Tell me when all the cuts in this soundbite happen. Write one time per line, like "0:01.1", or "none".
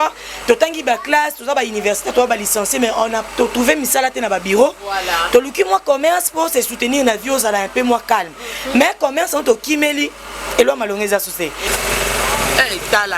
0:11.6